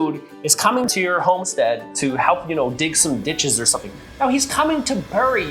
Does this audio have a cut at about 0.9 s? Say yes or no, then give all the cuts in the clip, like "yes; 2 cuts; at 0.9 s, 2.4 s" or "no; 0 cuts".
yes; 1 cut; at 0.9 s